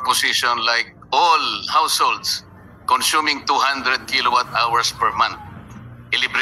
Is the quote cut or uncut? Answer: uncut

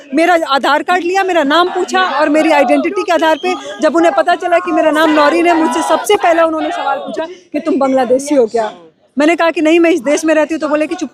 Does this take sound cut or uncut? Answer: uncut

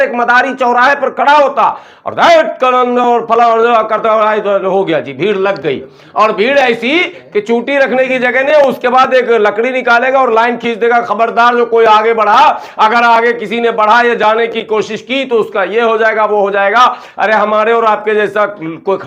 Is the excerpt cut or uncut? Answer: uncut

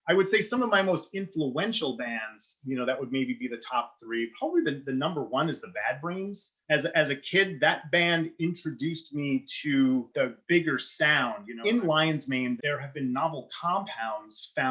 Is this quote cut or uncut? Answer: cut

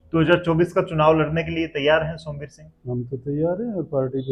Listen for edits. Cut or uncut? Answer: uncut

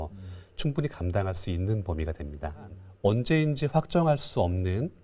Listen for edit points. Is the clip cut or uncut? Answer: cut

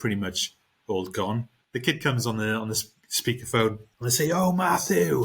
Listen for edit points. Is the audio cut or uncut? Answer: cut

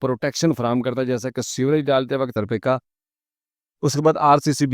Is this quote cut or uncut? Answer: cut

